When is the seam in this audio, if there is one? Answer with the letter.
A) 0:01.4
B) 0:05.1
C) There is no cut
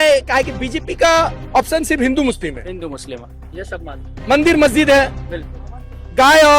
C